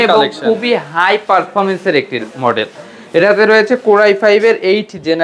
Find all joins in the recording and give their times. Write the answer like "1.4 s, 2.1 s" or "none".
none